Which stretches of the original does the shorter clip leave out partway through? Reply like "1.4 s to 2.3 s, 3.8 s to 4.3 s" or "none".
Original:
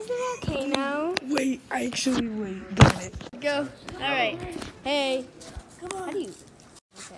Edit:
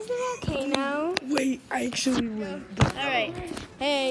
2.7 s to 3.7 s